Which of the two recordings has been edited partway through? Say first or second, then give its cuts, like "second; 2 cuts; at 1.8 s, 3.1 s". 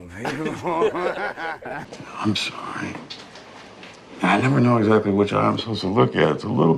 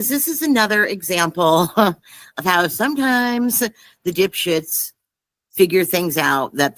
first; 1 cut; at 1.9 s